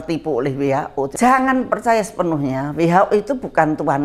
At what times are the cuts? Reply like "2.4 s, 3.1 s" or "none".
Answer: 1.1 s